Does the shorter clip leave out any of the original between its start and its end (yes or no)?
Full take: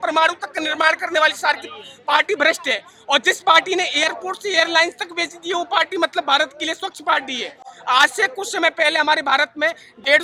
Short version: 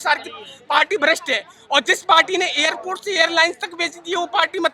no